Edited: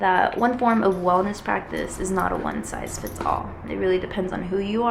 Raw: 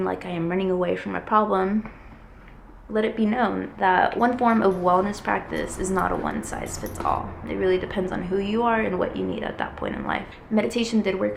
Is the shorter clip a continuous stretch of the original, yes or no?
yes